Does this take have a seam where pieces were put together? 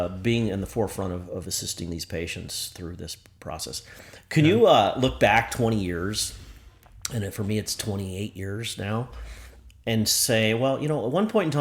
no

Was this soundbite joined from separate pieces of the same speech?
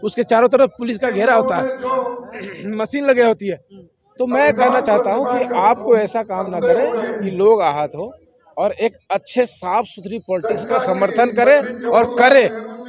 no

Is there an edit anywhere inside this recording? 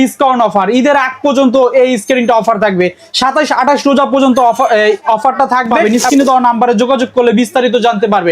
yes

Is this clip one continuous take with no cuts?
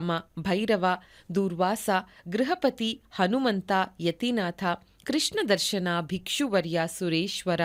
yes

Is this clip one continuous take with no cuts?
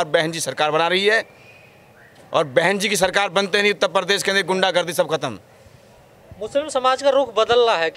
yes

